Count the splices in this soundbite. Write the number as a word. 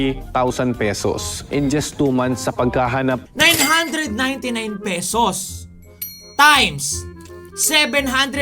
one